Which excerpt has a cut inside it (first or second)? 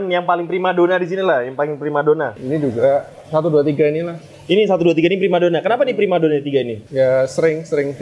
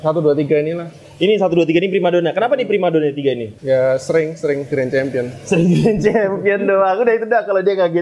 first